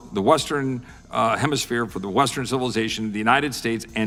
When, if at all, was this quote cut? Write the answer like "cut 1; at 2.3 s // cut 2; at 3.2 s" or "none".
none